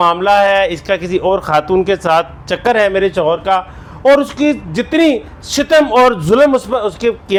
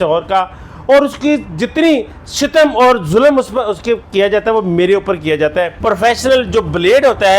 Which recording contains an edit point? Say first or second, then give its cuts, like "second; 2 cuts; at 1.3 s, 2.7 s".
second; 1 cut; at 5.7 s